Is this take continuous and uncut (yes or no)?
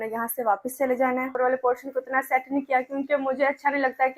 no